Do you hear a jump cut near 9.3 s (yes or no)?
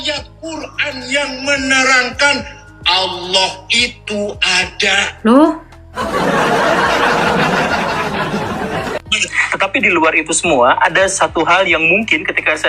yes